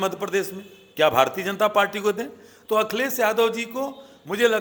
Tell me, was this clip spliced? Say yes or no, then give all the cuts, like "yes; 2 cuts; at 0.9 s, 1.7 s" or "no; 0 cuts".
no; 0 cuts